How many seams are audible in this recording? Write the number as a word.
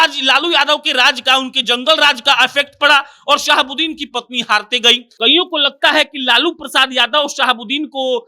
one